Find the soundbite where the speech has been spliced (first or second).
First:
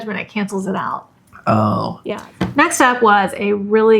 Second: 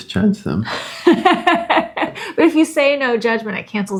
first